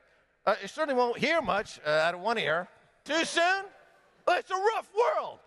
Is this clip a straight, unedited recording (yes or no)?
yes